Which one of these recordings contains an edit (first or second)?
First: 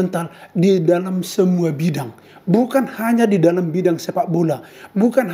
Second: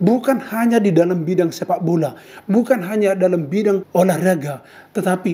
second